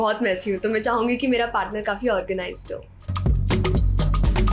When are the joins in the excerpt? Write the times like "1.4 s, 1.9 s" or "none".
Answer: none